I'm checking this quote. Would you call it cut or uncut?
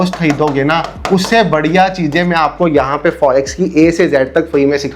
uncut